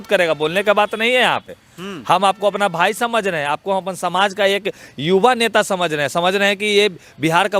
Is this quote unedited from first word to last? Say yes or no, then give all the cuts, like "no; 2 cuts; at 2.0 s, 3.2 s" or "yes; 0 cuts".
yes; 0 cuts